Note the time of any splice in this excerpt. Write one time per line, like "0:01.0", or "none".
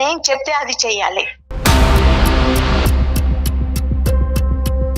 0:01.4